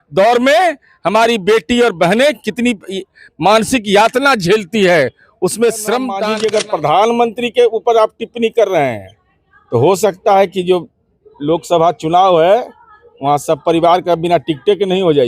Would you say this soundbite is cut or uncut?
cut